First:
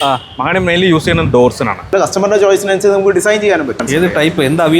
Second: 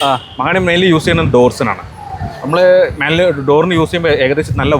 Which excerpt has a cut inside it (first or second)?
first